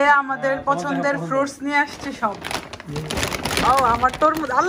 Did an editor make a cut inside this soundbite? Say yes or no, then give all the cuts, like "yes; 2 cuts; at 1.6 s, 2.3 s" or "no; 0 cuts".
no; 0 cuts